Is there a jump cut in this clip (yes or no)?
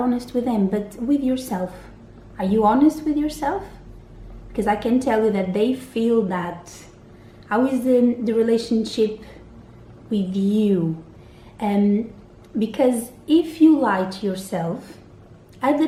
no